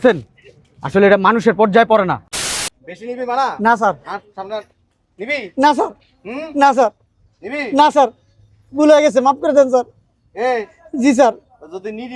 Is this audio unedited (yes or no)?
no